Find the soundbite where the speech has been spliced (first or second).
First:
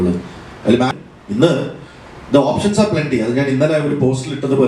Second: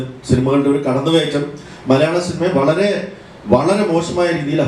first